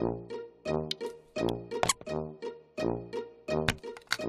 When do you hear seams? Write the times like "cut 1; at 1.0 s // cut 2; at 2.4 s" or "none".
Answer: cut 1; at 1.5 s